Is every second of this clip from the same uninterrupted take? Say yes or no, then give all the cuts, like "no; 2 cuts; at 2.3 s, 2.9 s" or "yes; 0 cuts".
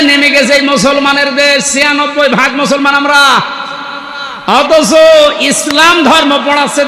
yes; 0 cuts